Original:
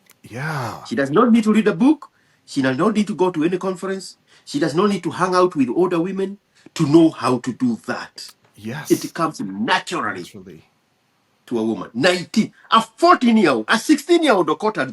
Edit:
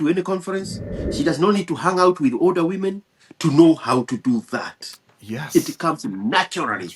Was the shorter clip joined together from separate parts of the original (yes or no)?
no